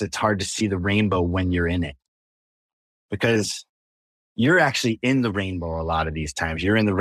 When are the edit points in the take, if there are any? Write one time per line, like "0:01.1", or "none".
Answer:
none